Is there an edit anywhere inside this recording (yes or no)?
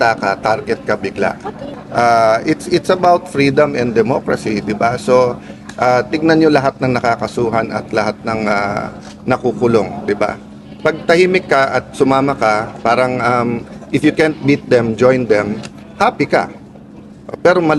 yes